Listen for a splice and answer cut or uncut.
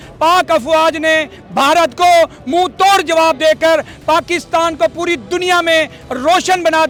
uncut